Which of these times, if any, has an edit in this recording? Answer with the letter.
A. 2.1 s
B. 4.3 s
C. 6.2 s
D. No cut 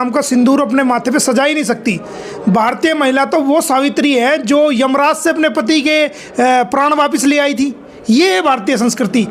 D